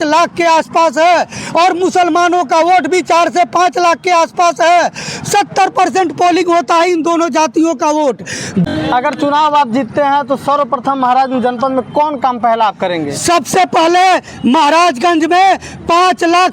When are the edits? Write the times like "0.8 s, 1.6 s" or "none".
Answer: 8.6 s